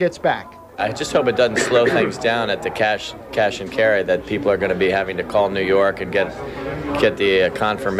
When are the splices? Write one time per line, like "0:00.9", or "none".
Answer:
none